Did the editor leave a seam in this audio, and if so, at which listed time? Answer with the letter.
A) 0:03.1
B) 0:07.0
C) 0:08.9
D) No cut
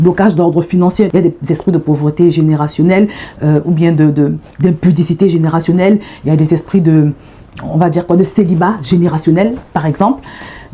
D